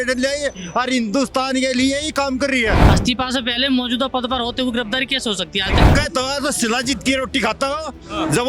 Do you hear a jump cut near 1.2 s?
no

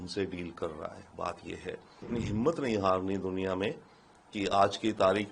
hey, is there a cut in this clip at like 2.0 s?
yes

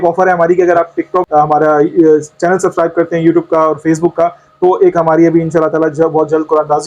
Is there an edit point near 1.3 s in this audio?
yes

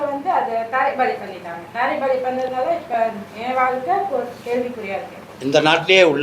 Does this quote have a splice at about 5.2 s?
yes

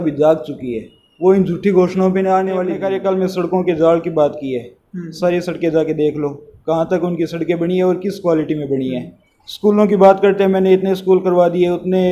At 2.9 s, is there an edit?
yes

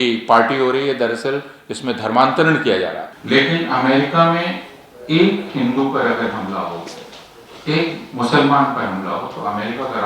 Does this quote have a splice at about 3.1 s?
yes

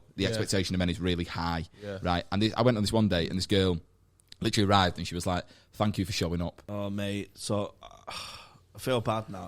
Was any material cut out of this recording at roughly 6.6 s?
yes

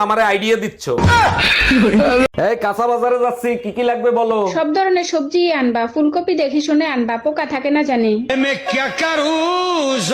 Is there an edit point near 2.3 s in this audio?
yes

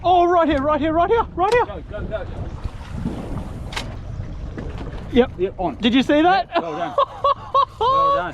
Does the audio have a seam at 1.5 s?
no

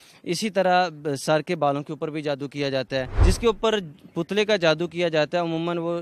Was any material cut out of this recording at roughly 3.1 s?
yes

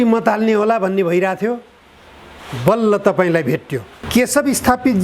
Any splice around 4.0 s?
yes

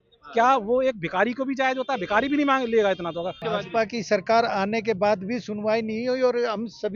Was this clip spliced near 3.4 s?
yes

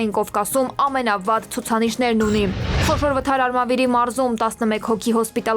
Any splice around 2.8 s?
yes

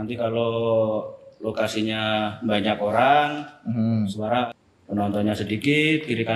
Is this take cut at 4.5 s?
yes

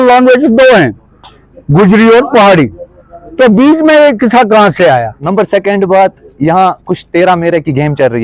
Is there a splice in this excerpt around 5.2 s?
yes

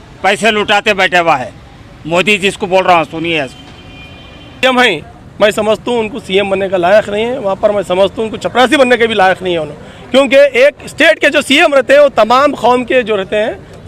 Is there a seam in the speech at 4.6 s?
yes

